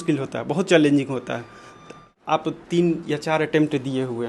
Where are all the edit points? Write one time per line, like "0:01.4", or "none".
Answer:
0:01.9